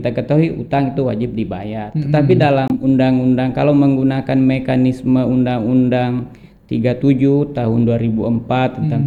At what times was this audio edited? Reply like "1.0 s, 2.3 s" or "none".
none